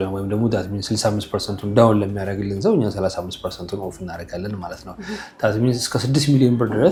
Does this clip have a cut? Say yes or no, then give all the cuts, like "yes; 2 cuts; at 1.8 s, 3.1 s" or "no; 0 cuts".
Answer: no; 0 cuts